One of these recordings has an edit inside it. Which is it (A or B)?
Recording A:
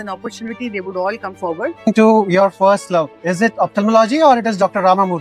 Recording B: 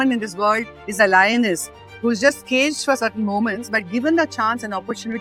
A